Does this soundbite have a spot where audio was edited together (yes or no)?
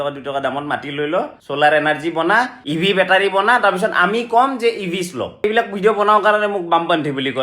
yes